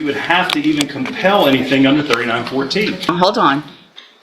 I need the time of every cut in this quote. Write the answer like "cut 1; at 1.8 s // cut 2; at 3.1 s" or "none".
cut 1; at 3.1 s